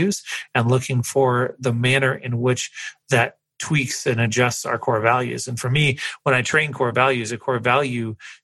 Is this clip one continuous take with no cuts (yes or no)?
yes